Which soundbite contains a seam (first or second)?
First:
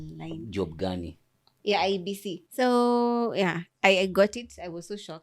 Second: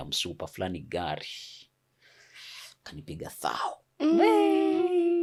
first